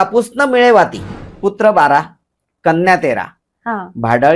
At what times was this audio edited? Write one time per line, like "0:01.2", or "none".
0:01.2